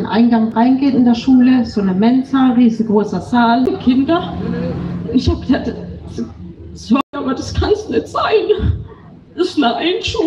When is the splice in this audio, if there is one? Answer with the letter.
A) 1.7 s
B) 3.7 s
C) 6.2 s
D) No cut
B